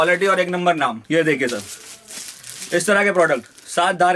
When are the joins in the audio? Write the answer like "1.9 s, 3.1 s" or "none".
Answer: 1.0 s